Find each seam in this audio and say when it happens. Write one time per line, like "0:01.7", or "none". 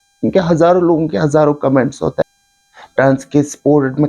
0:02.2